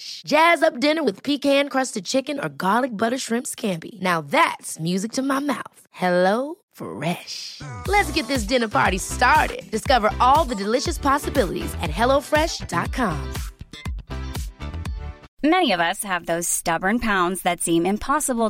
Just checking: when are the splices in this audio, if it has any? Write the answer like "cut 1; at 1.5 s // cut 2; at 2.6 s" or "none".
cut 1; at 15.2 s